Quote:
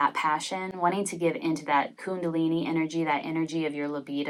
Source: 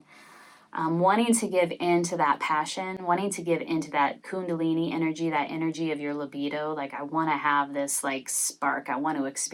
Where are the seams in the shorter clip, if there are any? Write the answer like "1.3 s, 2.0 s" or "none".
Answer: none